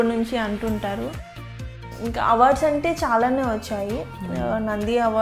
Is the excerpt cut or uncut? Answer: cut